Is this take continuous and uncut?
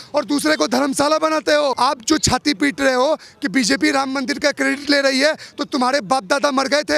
no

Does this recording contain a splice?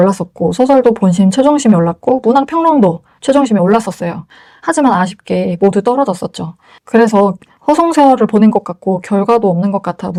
no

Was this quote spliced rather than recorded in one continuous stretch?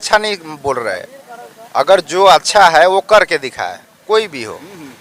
no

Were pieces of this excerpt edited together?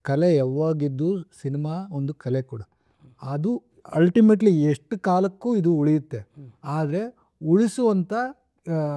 no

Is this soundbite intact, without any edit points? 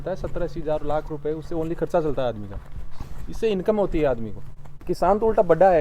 no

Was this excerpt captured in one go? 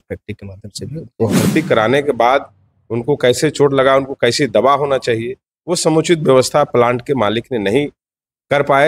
no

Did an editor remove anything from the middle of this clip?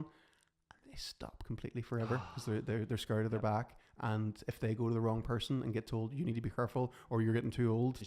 yes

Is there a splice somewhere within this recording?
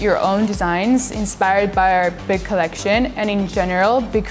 no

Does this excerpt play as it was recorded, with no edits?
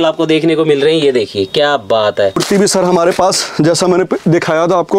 no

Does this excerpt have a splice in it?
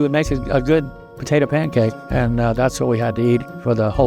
yes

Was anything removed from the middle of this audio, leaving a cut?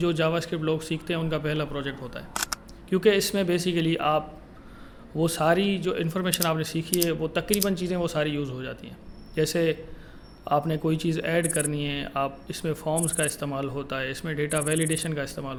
no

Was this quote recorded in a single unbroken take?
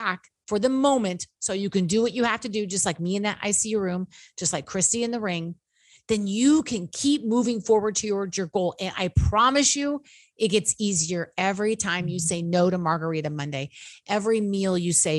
yes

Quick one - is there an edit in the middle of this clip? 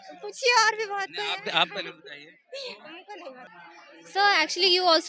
yes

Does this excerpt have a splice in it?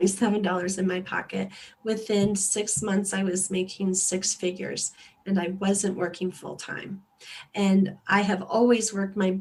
no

